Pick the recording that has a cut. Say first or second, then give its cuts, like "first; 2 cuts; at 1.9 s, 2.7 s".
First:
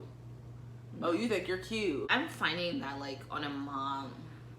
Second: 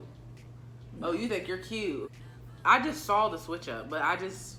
first; 1 cut; at 2.1 s